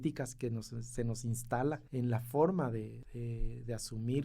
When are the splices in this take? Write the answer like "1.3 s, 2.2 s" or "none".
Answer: 1.8 s, 3.0 s